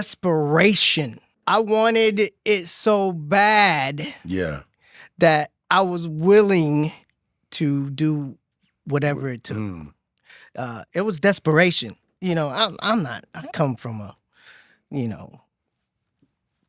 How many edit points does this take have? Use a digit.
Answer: 1